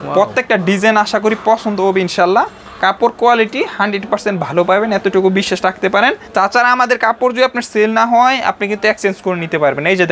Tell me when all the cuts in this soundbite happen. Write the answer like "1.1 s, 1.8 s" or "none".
none